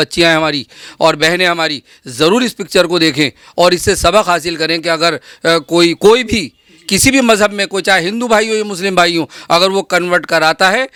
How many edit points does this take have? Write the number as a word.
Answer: zero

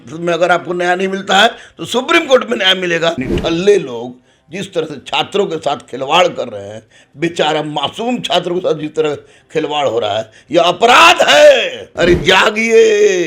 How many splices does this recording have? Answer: two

